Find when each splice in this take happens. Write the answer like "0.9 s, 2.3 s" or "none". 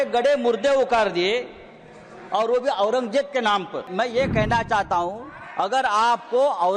3.9 s